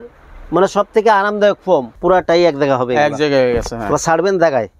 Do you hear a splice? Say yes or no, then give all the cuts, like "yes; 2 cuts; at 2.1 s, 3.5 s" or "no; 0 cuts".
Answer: yes; 1 cut; at 1.9 s